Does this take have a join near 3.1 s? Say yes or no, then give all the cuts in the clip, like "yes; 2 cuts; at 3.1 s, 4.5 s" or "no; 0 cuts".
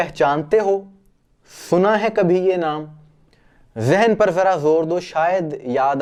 no; 0 cuts